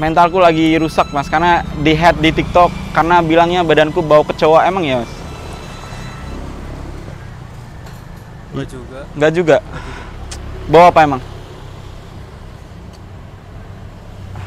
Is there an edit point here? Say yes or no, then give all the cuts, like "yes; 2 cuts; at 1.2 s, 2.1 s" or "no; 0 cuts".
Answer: no; 0 cuts